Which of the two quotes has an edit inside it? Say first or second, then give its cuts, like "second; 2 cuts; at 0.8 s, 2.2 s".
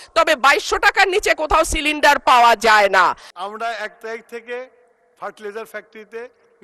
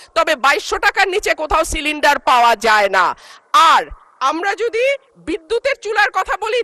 first; 1 cut; at 3.3 s